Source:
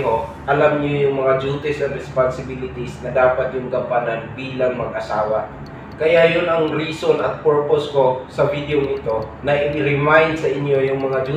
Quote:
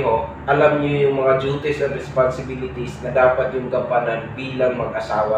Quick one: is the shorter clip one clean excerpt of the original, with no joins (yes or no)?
yes